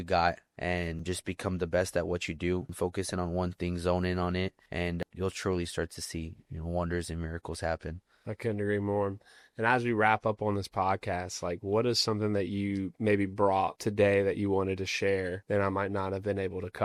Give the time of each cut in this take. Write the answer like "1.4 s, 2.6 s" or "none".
none